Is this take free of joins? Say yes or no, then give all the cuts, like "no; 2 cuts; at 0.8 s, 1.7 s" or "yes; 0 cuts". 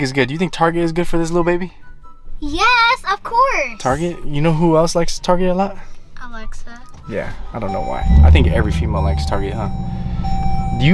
yes; 0 cuts